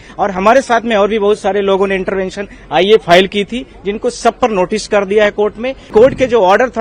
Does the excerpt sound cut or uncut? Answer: cut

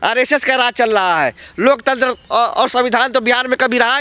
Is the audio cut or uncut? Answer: uncut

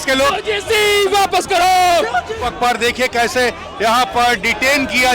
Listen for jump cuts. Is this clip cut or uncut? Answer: cut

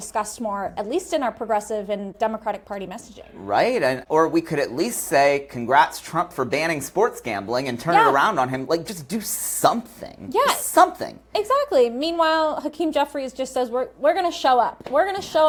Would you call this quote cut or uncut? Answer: uncut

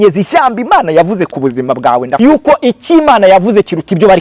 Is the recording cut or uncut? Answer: cut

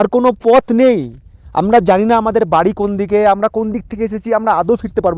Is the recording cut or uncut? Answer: uncut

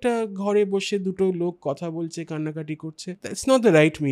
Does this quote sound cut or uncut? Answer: cut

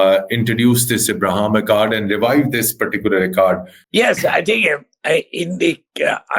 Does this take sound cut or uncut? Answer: cut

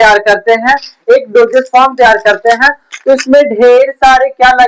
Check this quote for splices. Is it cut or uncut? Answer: uncut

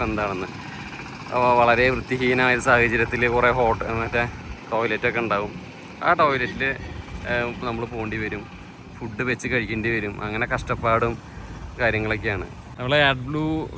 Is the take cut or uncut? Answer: cut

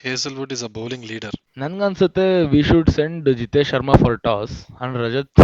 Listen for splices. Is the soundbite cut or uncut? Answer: cut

